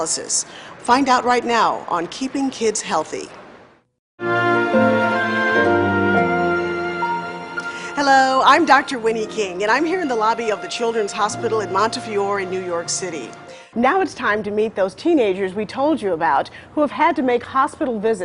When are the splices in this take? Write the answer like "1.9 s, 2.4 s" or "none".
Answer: 16.1 s